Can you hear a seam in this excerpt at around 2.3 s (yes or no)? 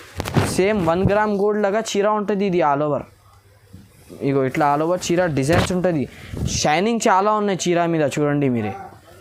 no